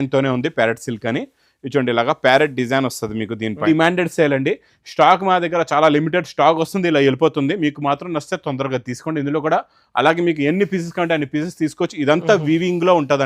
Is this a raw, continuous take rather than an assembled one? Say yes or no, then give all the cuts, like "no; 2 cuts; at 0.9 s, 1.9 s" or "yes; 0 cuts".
no; 1 cut; at 3.6 s